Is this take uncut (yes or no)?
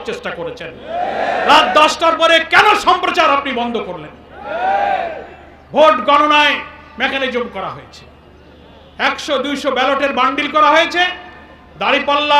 yes